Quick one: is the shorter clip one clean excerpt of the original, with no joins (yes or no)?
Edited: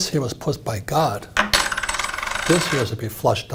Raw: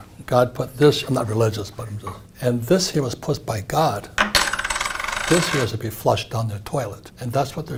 yes